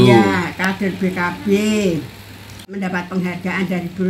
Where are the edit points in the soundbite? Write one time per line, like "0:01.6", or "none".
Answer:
0:02.8

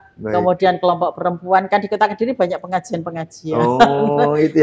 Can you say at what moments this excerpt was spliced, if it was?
none

